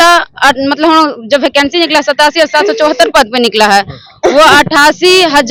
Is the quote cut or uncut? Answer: uncut